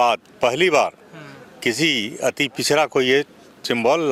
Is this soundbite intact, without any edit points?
yes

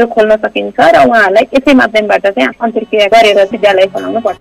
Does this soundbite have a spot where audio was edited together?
yes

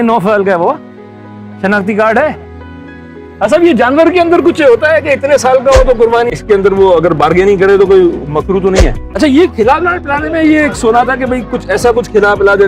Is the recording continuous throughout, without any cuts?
no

